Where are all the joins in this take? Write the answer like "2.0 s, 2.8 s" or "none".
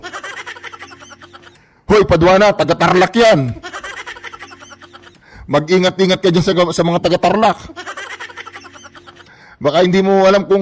none